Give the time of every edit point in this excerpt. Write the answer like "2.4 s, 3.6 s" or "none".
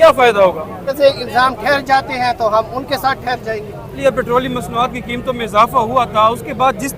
1.0 s, 4.0 s